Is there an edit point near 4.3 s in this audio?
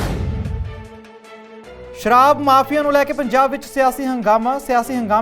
no; 1 cut; at 2.0 s

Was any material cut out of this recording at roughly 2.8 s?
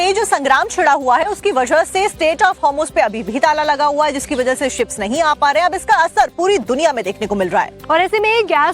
yes; 1 cut; at 2.8 s

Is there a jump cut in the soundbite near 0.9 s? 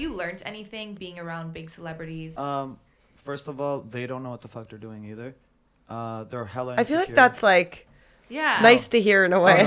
no; 1 cut; at 2.3 s

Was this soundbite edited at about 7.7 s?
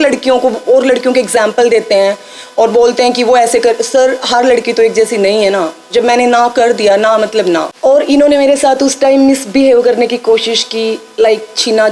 yes; 1 cut; at 7.7 s

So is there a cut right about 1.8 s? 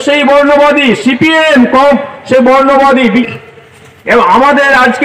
no; 1 cut; at 3.2 s

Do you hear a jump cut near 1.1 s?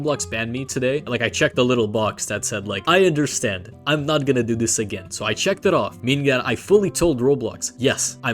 yes; 1 cut; at 1.1 s

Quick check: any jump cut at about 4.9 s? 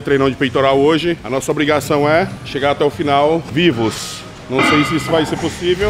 no; 3 cuts; at 1.2 s, 2.4 s, 3.5 s

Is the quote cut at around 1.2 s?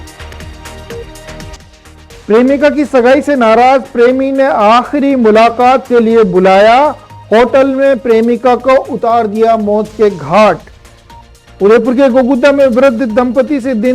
yes; 1 cut; at 1.2 s

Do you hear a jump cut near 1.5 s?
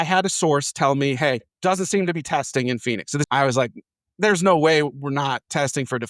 yes; 2 cuts; at 1.5 s, 3.3 s

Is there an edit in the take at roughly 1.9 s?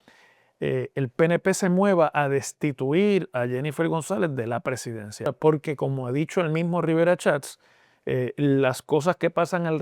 no; 1 cut; at 5.3 s

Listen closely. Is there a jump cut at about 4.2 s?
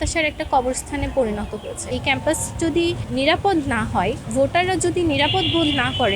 yes; 3 cuts; at 1.8 s, 3.0 s, 4.2 s

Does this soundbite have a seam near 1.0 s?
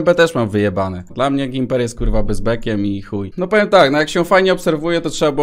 yes; 2 cuts; at 1.0 s, 3.3 s

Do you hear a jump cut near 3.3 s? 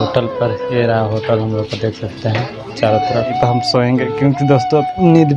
yes; 1 cut; at 3.3 s

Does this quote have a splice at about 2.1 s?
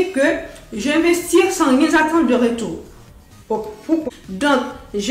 no; 1 cut; at 4.0 s

